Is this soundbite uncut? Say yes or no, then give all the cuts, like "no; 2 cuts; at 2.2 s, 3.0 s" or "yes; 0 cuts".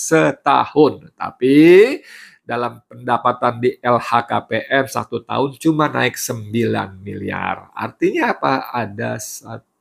yes; 0 cuts